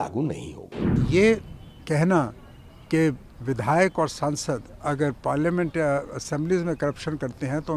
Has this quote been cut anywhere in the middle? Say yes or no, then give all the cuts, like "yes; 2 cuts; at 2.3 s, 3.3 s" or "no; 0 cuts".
yes; 1 cut; at 0.9 s